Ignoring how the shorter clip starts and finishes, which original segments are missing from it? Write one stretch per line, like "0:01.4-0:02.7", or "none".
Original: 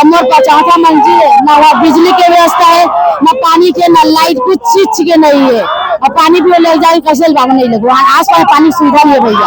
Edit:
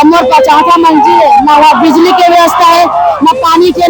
none